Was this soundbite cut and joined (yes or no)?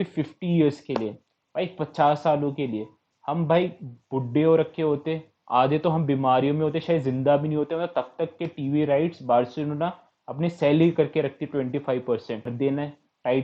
yes